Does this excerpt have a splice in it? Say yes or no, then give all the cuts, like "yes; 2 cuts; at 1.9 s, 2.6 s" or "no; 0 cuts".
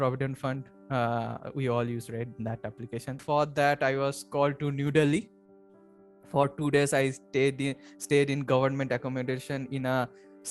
yes; 1 cut; at 3.2 s